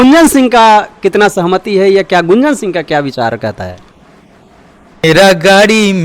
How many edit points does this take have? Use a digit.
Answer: 1